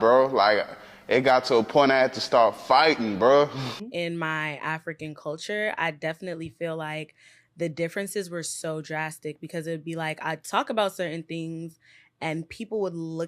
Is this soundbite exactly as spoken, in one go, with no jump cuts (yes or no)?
no